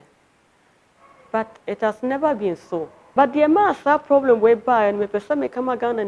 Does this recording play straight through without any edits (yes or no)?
no